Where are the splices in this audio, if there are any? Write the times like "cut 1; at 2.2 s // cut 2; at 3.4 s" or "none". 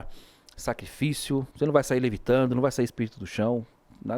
cut 1; at 1.5 s